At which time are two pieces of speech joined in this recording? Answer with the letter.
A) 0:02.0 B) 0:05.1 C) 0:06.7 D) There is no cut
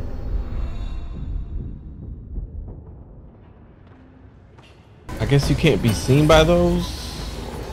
B